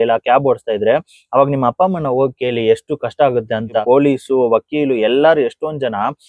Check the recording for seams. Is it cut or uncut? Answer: cut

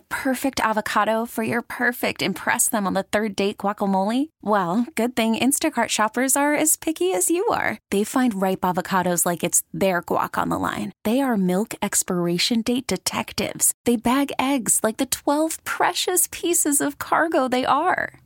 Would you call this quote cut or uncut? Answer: uncut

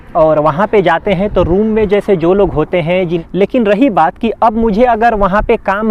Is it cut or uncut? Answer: cut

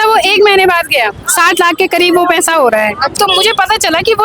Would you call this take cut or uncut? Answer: cut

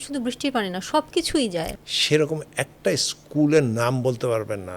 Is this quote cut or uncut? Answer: cut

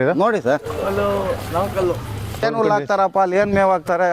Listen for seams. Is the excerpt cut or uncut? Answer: cut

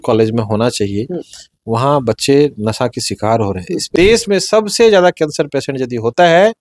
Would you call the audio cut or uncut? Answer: cut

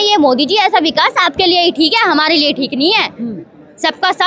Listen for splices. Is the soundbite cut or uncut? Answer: uncut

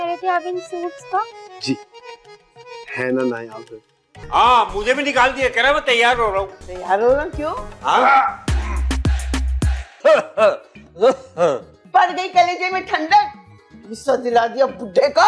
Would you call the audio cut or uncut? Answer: cut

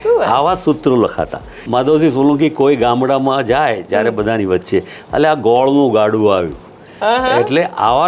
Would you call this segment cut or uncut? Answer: cut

